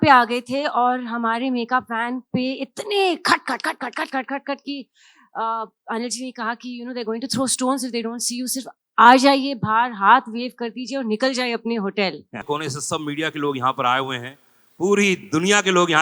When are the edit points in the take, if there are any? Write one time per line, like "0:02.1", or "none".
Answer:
0:12.4